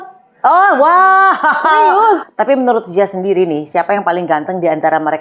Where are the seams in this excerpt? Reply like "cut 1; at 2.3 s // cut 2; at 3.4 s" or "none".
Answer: cut 1; at 2.3 s